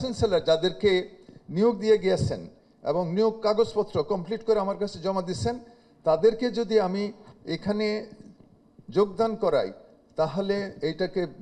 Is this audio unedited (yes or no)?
yes